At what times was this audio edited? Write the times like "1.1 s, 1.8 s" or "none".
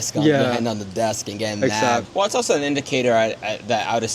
2.1 s